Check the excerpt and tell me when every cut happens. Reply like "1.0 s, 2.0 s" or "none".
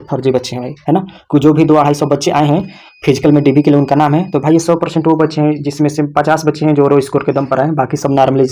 none

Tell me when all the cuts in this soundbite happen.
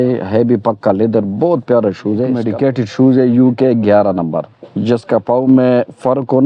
2.4 s

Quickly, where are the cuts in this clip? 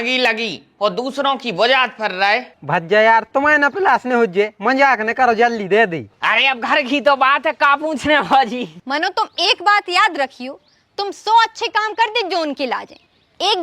2.5 s, 6.1 s, 8.8 s

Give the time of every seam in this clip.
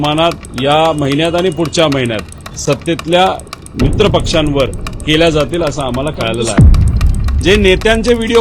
6.8 s

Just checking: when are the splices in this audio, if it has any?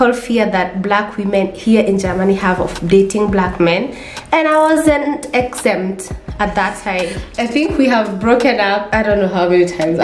7.2 s, 8.9 s

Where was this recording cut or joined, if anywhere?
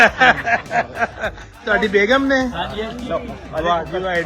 1.6 s

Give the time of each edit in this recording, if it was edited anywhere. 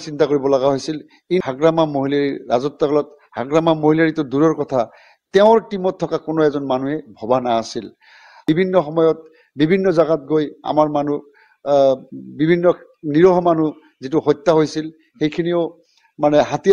1.5 s, 8.3 s

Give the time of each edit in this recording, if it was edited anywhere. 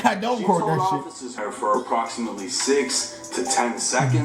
1.4 s

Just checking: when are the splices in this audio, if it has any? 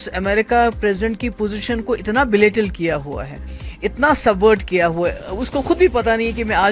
none

